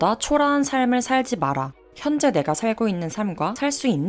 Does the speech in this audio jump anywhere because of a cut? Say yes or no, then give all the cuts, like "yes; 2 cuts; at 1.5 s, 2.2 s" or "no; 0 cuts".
yes; 1 cut; at 1.8 s